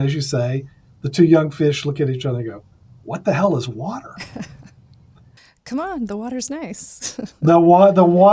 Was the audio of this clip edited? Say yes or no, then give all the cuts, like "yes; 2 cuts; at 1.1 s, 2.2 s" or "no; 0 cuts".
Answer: yes; 1 cut; at 5.1 s